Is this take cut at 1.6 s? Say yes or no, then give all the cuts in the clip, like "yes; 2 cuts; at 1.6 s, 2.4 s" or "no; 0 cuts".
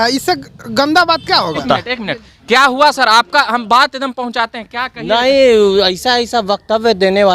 yes; 1 cut; at 1.6 s